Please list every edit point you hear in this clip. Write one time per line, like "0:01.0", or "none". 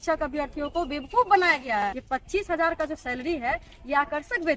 0:01.8